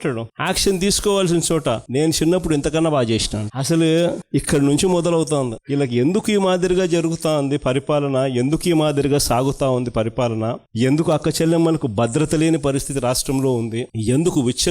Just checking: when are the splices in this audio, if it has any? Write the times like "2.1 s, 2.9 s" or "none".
none